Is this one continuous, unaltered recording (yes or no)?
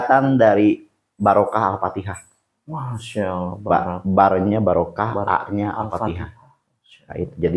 yes